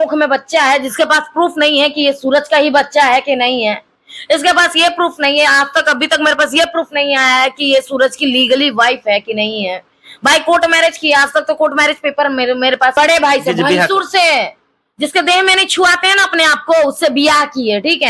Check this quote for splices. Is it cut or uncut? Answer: cut